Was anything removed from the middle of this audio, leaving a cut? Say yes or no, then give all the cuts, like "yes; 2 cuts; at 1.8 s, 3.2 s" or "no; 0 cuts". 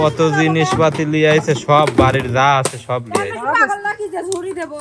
no; 0 cuts